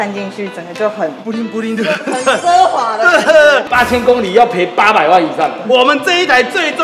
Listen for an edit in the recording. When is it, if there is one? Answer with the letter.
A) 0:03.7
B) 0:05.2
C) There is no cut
A